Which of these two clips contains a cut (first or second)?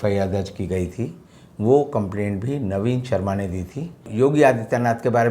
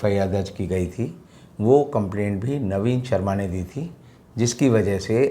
first